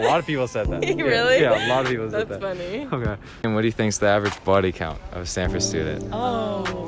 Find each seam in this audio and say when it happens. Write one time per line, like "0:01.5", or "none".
0:03.3